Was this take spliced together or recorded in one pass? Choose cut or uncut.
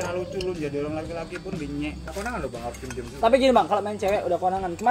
cut